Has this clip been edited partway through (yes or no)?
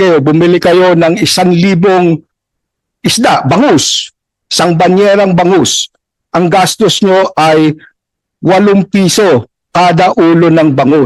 no